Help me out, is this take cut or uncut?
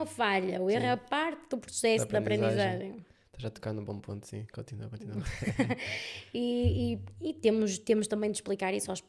uncut